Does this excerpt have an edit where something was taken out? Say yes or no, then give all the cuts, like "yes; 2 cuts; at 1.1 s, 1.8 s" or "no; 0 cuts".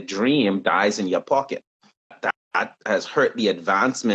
yes; 1 cut; at 2.2 s